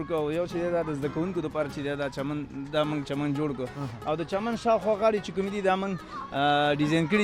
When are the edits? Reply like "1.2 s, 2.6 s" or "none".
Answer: none

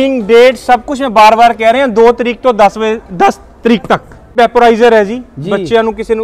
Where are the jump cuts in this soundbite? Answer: none

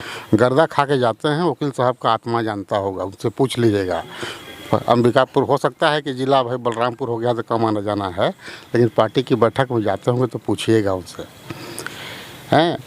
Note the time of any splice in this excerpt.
none

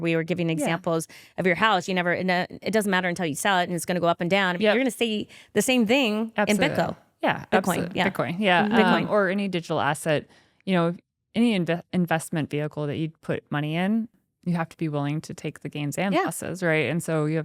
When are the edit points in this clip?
14.2 s

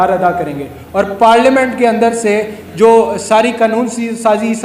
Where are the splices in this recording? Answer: none

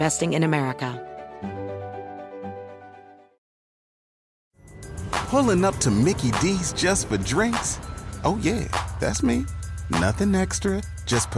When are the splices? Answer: 0.9 s

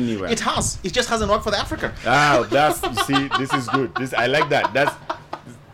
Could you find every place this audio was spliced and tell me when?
none

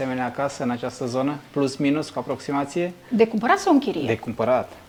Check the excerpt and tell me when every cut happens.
none

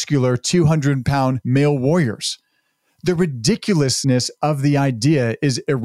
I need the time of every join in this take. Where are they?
1.4 s

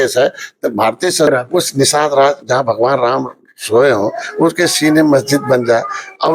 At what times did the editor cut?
1.3 s

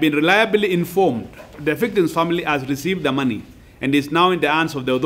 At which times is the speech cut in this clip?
1.5 s

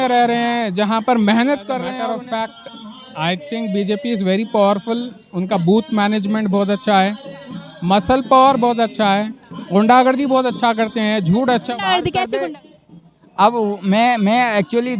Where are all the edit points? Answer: 2.0 s, 12.3 s

